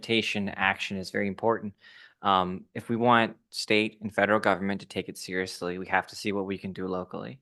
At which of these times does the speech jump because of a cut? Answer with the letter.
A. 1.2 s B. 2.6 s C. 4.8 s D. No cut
D